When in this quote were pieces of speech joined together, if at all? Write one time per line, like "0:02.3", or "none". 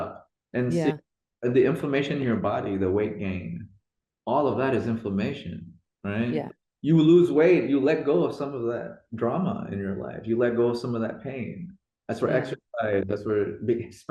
0:06.6